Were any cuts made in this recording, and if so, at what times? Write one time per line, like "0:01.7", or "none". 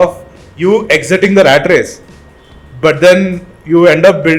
none